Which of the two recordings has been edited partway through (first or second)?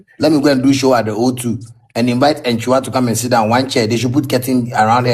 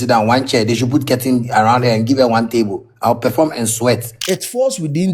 second